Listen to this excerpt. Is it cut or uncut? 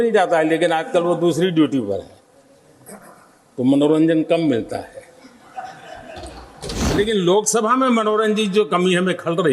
cut